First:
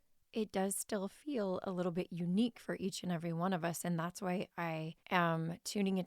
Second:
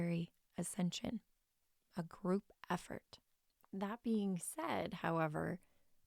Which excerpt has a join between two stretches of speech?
first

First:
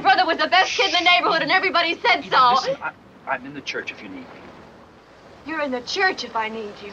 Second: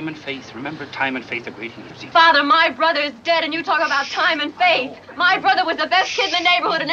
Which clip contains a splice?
first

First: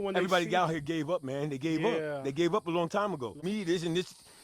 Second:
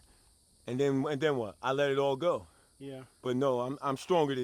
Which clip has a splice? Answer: first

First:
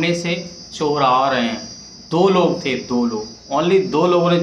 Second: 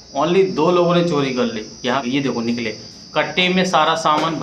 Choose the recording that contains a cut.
second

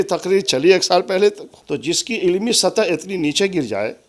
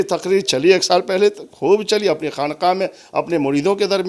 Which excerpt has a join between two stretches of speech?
first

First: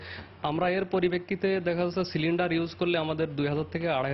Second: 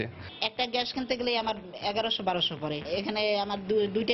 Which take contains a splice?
second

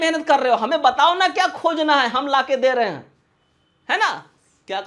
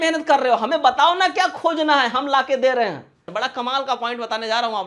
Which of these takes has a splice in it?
second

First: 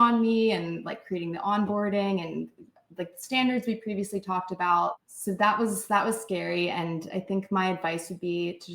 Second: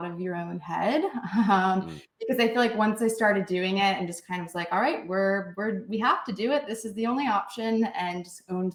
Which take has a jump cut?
first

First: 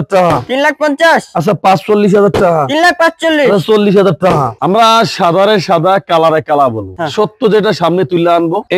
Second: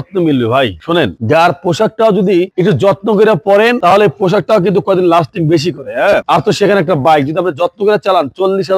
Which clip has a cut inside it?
first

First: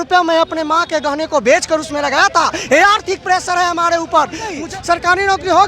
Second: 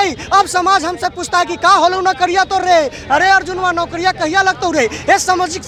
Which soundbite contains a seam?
first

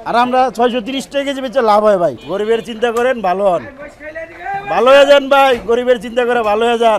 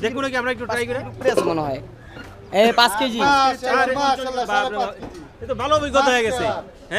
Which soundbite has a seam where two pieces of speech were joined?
first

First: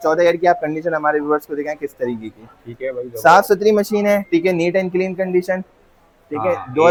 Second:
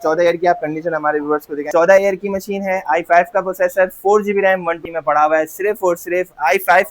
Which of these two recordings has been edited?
second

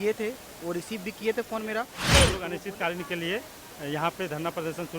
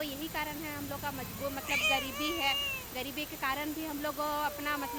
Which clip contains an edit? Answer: first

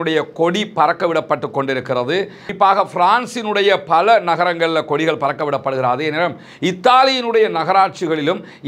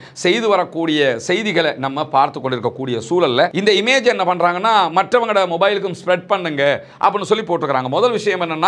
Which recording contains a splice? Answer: second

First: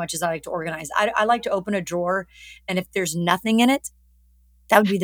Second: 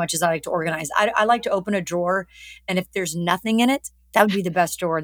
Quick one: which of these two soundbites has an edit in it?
second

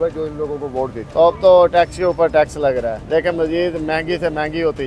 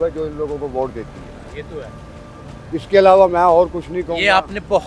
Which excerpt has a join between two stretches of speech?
first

